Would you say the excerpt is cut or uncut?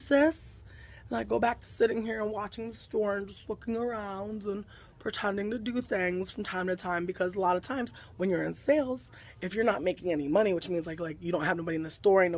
cut